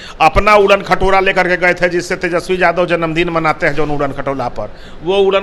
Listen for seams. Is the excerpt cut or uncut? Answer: uncut